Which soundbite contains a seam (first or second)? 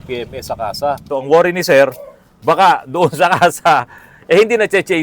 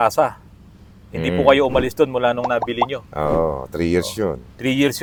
first